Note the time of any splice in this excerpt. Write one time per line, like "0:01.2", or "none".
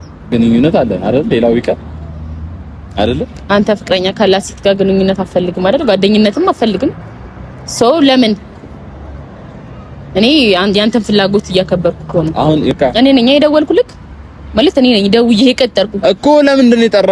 0:12.7